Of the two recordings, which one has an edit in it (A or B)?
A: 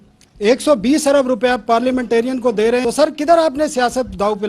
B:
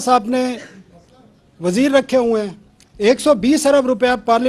A